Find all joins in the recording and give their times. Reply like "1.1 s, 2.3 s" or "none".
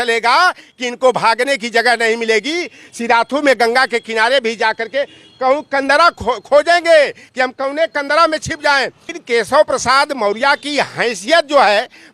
9.1 s